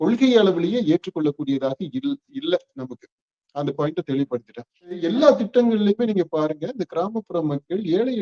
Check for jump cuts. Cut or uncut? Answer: cut